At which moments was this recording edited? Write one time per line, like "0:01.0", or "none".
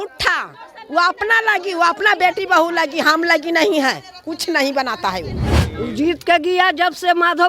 0:05.6